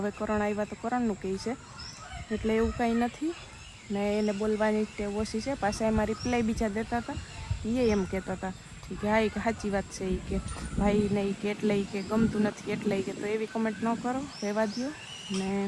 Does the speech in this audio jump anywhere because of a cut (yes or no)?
no